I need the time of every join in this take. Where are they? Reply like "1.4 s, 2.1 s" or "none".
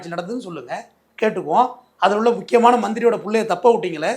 none